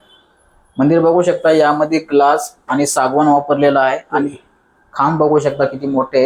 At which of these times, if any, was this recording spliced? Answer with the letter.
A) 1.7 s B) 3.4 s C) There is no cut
C